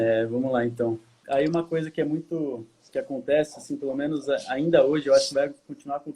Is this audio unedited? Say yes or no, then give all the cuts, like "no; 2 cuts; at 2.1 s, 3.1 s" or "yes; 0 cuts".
no; 1 cut; at 1.1 s